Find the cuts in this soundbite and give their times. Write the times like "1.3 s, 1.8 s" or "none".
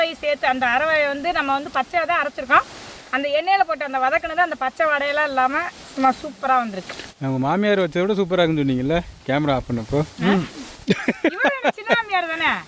none